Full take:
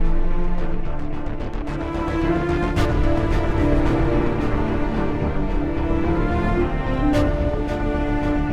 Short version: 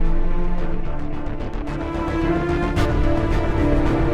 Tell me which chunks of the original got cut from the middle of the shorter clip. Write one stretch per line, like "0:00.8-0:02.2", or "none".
none